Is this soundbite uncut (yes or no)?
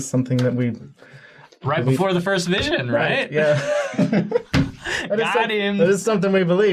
no